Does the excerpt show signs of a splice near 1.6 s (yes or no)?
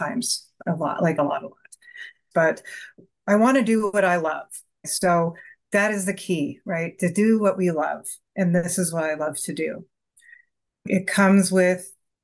no